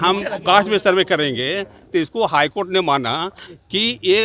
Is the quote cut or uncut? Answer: uncut